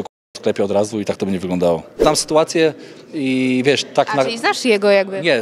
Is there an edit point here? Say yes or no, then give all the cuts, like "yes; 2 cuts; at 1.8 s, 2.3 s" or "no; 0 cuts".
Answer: yes; 1 cut; at 2.0 s